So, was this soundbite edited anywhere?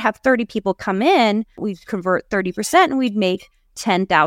yes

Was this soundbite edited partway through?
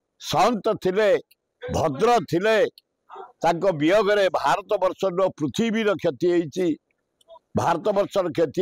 no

